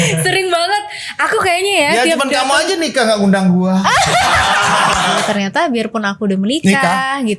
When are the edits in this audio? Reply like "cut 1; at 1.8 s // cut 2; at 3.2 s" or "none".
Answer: cut 1; at 5.2 s